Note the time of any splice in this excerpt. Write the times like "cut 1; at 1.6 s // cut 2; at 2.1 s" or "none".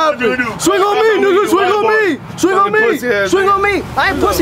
none